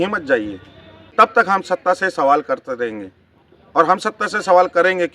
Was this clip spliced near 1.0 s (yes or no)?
yes